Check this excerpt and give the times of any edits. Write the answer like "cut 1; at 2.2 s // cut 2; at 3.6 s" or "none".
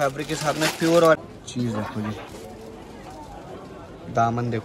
cut 1; at 1.2 s